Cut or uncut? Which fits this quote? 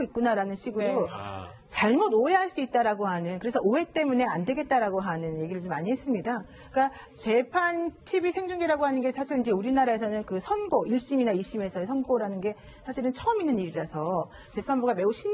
cut